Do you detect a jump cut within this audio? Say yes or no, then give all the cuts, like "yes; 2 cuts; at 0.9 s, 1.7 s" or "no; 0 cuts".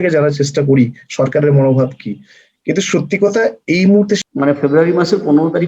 yes; 1 cut; at 4.2 s